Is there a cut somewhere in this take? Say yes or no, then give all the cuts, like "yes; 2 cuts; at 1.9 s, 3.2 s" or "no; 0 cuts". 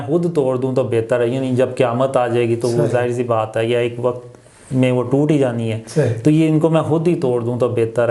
no; 0 cuts